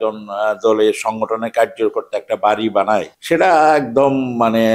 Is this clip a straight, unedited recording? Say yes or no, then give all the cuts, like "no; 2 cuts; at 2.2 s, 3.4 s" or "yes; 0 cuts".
no; 1 cut; at 3.1 s